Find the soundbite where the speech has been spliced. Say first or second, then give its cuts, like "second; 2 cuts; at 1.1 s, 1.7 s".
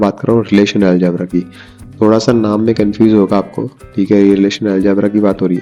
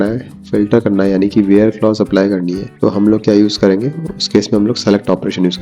second; 1 cut; at 2.6 s